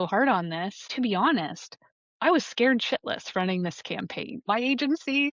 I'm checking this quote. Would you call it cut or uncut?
cut